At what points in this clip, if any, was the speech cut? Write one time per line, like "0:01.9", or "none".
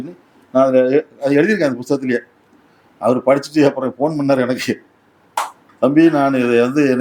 none

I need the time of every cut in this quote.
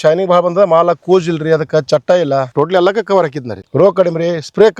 0:02.5
0:03.6

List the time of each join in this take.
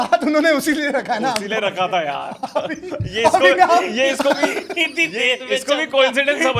none

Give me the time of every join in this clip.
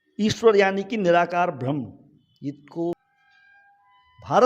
0:03.0

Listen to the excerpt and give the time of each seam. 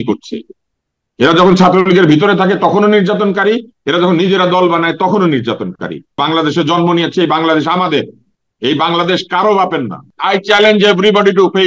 0:06.2
0:10.1

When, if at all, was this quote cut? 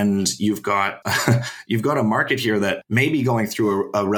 0:01.0
0:02.8

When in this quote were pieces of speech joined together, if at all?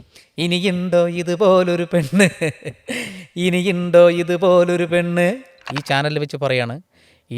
0:05.8

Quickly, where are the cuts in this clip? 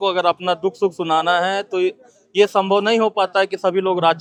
none

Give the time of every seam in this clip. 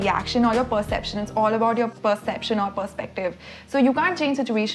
0:01.9

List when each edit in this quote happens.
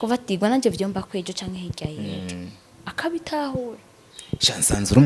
none

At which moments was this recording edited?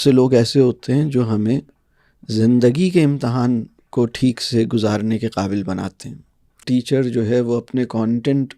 0:03.8
0:06.6

